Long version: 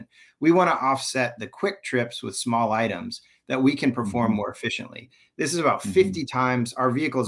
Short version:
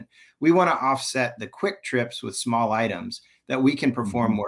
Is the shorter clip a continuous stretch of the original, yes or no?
yes